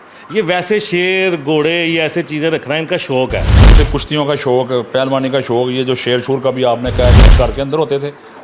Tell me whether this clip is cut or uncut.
cut